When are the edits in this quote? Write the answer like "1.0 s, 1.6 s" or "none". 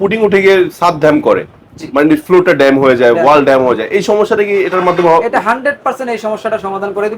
none